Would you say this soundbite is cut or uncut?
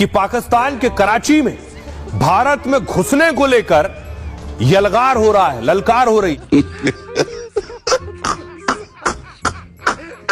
cut